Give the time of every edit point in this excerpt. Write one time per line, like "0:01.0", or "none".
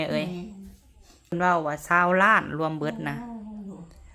0:01.3